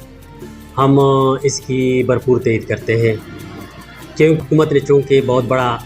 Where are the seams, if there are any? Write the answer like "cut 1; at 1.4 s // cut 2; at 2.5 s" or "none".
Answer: cut 1; at 4.4 s